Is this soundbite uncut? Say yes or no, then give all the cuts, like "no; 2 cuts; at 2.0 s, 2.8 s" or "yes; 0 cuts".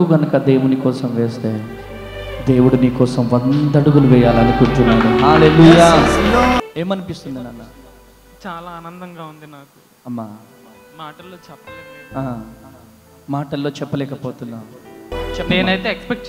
no; 2 cuts; at 6.7 s, 15.1 s